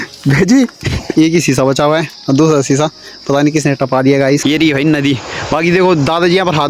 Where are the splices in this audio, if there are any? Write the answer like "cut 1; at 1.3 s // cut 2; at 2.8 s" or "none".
cut 1; at 1.0 s // cut 2; at 4.4 s